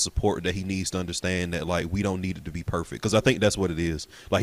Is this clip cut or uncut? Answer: uncut